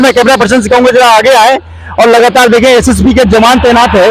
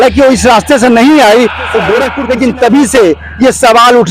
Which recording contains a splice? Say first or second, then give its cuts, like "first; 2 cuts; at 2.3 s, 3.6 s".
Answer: second; 1 cut; at 2.2 s